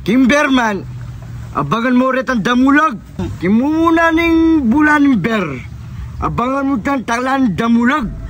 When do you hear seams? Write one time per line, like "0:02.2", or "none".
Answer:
0:03.2